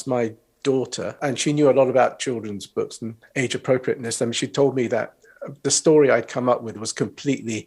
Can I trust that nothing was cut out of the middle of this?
no; 1 cut; at 1.2 s

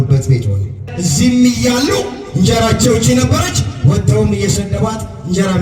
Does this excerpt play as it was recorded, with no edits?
no; 1 cut; at 0.9 s

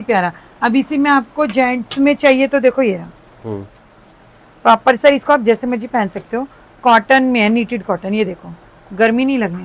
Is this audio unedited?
yes; 0 cuts

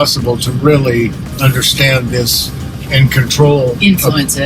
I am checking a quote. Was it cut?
no; 0 cuts

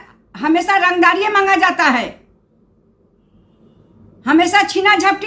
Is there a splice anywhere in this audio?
no; 0 cuts

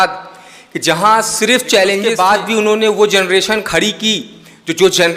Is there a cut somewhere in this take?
yes; 1 cut; at 2.1 s

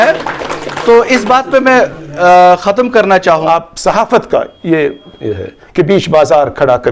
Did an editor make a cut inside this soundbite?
yes; 1 cut; at 3.5 s

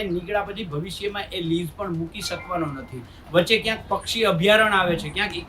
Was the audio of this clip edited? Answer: no; 0 cuts

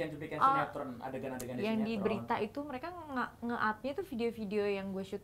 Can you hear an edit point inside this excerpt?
no; 0 cuts

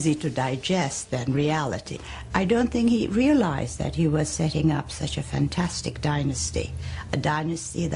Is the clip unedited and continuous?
no; 1 cut; at 2.0 s

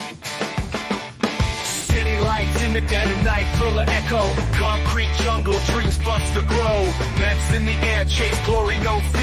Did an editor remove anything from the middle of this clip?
no; 0 cuts

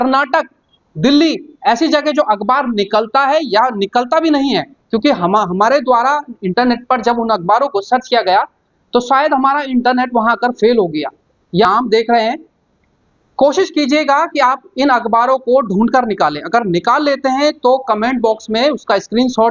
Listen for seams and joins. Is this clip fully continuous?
no; 1 cut; at 11.7 s

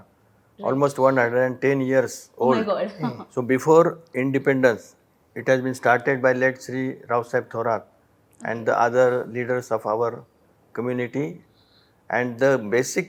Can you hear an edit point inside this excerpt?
no; 0 cuts

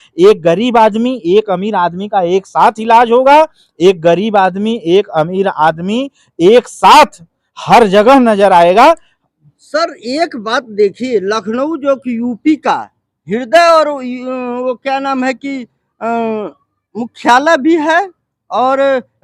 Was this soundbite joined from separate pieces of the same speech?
no; 0 cuts

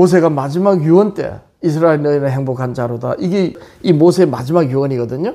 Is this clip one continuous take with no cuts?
no; 1 cut; at 3.7 s

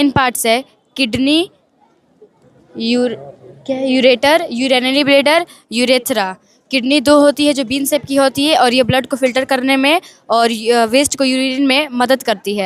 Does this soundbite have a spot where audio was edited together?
no; 0 cuts

